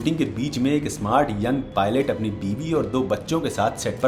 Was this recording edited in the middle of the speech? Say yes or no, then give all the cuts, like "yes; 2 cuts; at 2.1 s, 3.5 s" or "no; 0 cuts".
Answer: no; 0 cuts